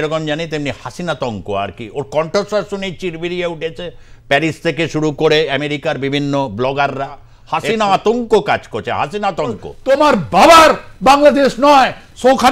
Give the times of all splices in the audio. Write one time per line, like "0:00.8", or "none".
0:07.3
0:09.7